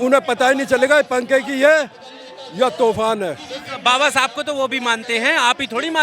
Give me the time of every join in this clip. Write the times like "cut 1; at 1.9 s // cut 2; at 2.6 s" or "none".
none